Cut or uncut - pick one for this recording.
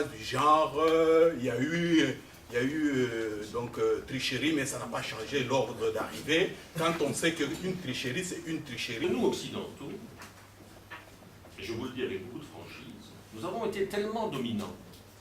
cut